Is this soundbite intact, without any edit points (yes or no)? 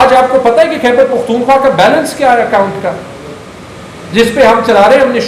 yes